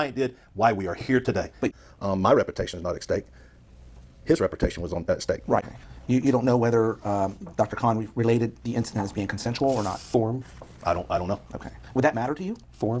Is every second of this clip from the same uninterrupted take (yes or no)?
no